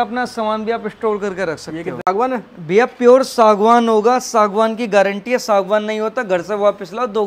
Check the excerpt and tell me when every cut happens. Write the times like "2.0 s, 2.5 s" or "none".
2.1 s